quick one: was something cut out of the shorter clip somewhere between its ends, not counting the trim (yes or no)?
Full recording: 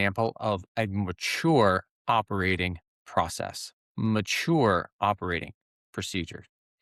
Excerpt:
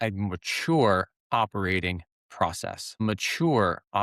yes